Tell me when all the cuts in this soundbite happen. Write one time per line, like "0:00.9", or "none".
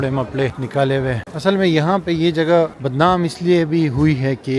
0:00.9
0:02.8

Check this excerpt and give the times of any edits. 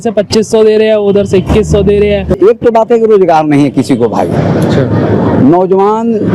0:02.4

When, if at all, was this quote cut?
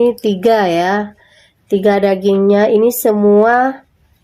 none

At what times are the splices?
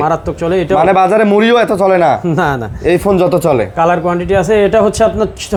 none

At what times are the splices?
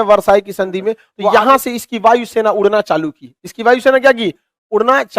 0:01.1

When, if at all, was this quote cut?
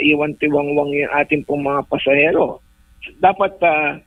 none

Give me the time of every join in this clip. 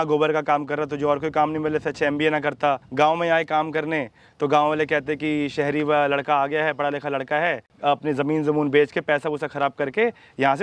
0:02.9
0:07.7

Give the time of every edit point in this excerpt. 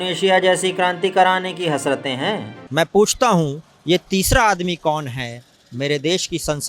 0:02.5

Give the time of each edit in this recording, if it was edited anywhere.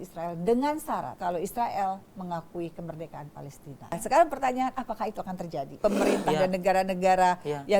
0:01.1
0:03.9
0:05.7

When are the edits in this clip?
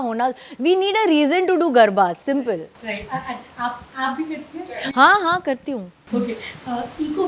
none

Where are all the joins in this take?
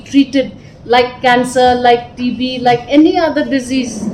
none

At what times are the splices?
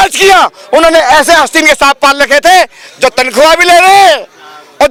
none

